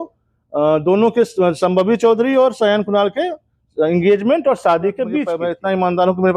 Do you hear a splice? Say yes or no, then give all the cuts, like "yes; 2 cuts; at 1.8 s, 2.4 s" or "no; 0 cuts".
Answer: yes; 1 cut; at 5.4 s